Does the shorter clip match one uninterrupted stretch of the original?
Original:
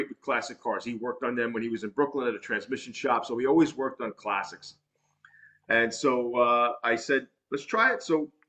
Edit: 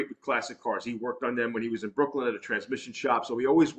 yes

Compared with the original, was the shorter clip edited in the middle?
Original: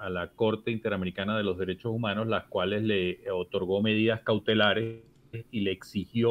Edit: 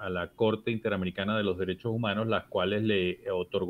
no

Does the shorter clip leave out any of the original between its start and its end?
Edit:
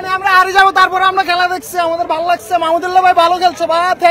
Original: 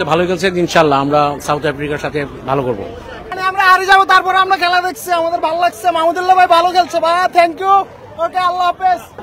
no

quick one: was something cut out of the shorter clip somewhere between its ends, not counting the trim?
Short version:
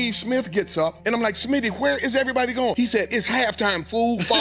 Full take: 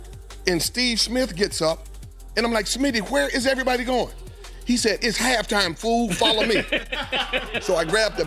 yes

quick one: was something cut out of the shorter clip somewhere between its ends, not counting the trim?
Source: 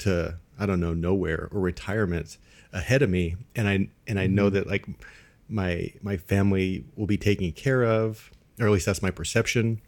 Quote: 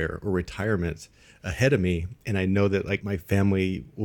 yes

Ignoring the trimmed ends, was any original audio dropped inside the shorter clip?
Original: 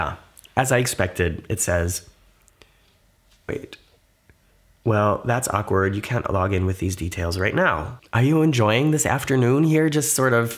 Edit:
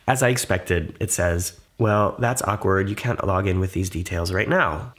yes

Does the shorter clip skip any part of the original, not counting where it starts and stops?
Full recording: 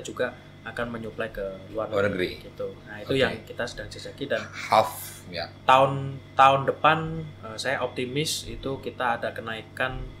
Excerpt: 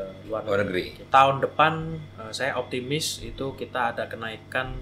yes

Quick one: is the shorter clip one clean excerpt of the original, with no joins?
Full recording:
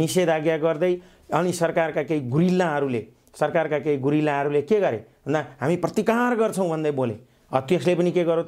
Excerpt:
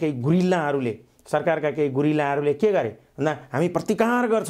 yes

